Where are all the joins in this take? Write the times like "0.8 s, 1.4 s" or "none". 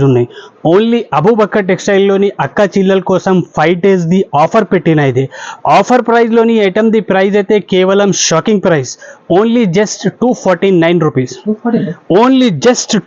none